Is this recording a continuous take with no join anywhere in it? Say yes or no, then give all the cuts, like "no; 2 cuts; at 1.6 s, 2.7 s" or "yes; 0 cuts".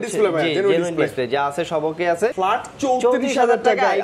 no; 1 cut; at 2.3 s